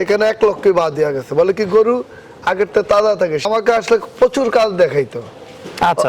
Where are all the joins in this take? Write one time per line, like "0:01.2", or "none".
0:03.4

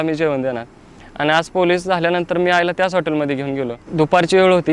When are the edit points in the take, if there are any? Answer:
0:03.8

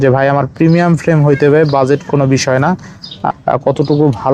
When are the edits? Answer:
0:03.1

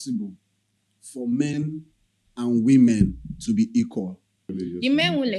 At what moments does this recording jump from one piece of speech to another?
0:04.5

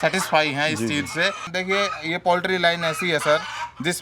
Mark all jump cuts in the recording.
0:01.5

